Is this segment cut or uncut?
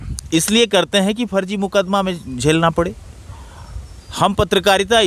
uncut